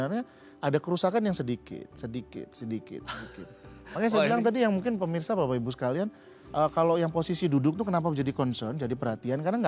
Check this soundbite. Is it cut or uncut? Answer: uncut